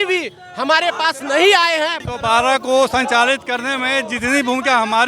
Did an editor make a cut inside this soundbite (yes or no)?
yes